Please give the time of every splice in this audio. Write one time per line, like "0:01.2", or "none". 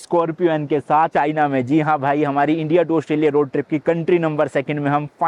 none